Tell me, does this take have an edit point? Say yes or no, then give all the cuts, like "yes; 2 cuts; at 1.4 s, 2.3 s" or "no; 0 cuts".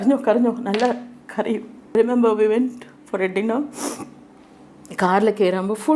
yes; 1 cut; at 2.0 s